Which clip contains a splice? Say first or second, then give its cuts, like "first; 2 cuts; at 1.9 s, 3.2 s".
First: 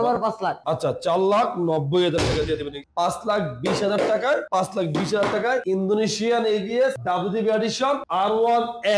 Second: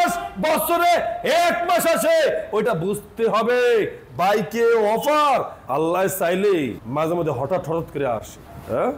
first; 5 cuts; at 2.8 s, 4.5 s, 5.6 s, 7.0 s, 8.0 s